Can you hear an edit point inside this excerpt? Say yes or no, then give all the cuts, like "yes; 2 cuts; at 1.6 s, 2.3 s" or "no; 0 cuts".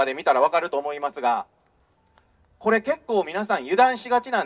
no; 0 cuts